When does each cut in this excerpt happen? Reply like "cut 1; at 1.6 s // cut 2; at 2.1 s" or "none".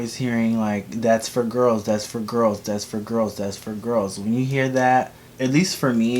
cut 1; at 5.2 s

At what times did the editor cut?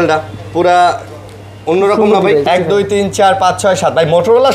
cut 1; at 2.5 s

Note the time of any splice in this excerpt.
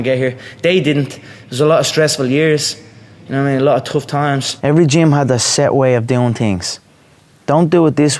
cut 1; at 4.5 s

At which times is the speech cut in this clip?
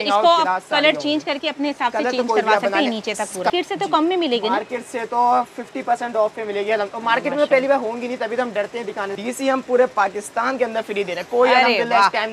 cut 1; at 3.5 s // cut 2; at 9.1 s

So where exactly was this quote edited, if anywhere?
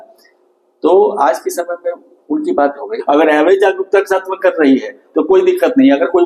cut 1; at 2.9 s

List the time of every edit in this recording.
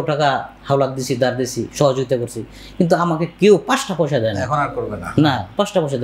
none

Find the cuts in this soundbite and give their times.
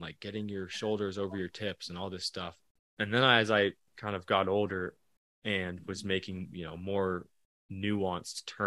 cut 1; at 2.6 s // cut 2; at 3.9 s

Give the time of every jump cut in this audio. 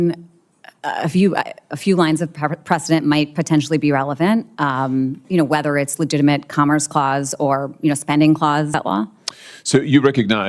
cut 1; at 8.7 s

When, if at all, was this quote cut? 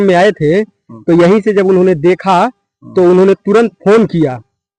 none

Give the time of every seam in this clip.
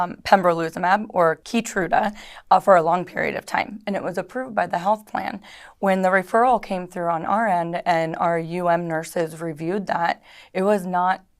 cut 1; at 1.4 s

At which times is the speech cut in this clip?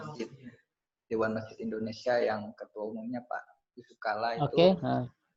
none

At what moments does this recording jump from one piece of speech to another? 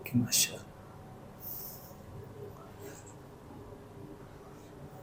none

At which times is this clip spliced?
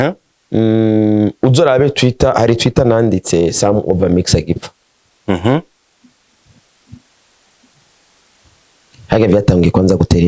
none

